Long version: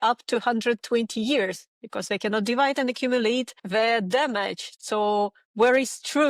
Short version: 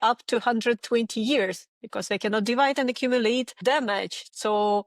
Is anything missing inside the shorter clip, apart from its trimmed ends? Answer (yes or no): yes